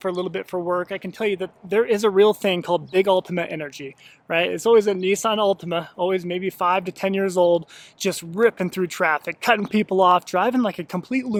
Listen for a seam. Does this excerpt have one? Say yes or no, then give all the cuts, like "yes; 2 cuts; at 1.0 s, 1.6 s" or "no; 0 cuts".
no; 0 cuts